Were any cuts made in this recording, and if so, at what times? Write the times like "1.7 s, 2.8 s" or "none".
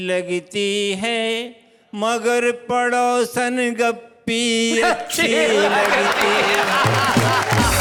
none